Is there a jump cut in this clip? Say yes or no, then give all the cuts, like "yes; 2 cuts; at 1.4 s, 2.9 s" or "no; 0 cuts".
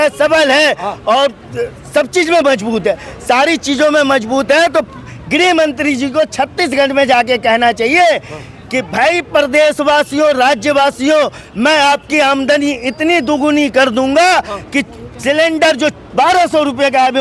no; 0 cuts